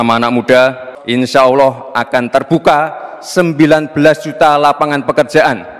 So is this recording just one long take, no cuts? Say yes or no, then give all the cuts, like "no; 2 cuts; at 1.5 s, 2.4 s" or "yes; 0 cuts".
yes; 0 cuts